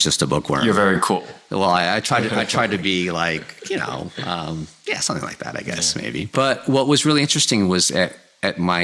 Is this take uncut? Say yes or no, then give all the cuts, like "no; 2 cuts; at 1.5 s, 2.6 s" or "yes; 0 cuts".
no; 1 cut; at 6.3 s